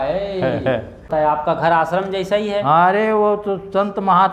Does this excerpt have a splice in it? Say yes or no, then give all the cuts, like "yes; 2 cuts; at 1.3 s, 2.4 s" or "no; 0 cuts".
yes; 1 cut; at 1.2 s